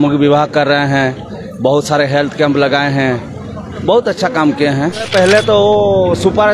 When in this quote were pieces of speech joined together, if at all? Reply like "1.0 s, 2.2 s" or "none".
5.1 s